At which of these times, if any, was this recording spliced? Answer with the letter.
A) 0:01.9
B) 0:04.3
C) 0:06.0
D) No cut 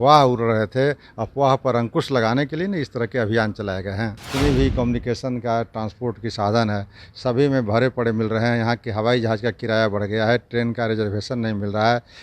B